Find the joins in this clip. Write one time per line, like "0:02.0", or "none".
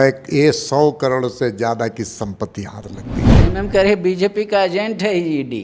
0:03.3